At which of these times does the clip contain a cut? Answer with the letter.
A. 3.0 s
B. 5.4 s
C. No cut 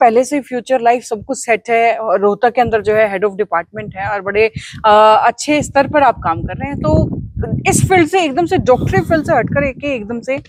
C